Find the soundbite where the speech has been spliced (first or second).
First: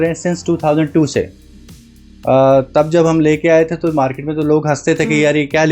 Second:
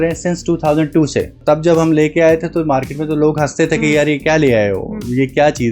second